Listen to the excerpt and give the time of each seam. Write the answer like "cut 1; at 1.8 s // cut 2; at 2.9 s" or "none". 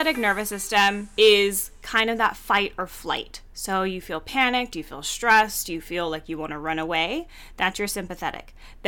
cut 1; at 1.0 s